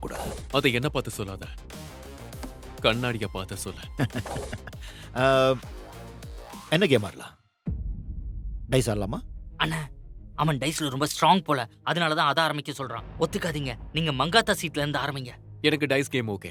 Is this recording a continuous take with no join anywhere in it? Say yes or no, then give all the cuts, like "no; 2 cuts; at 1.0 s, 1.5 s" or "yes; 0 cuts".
yes; 0 cuts